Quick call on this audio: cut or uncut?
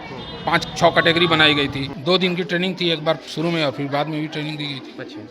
cut